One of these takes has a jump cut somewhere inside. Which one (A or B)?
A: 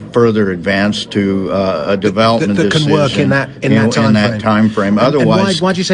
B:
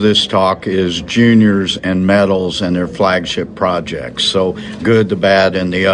B